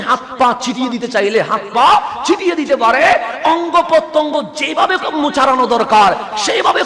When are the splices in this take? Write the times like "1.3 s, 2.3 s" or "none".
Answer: none